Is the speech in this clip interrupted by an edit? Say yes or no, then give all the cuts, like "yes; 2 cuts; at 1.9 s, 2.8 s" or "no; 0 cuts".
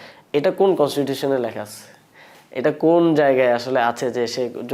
no; 0 cuts